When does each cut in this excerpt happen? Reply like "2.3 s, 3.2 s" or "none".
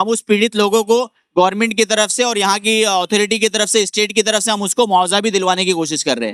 none